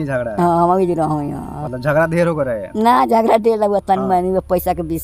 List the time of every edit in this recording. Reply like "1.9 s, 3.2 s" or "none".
none